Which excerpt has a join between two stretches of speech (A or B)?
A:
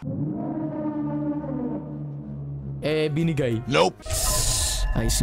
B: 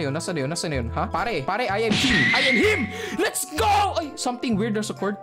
A